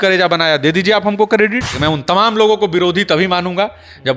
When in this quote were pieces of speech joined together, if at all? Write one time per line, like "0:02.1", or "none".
0:01.7